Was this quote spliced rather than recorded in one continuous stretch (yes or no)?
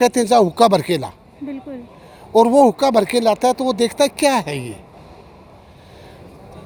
no